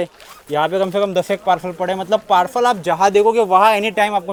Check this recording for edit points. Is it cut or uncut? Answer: uncut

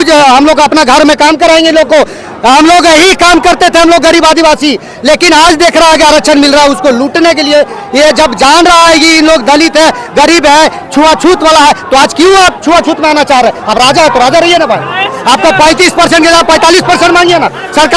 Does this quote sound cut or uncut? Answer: uncut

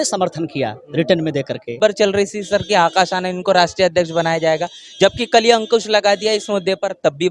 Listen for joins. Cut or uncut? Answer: cut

